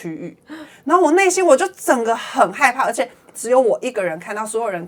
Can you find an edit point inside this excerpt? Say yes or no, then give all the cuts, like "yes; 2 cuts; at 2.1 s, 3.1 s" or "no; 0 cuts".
no; 0 cuts